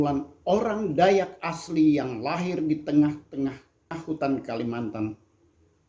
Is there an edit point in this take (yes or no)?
yes